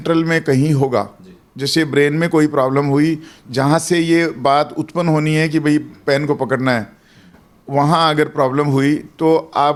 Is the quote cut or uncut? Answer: uncut